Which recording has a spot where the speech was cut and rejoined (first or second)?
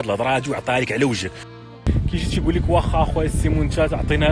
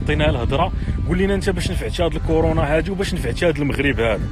first